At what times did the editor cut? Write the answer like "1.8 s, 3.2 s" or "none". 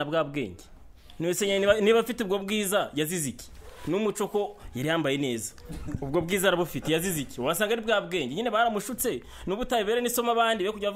none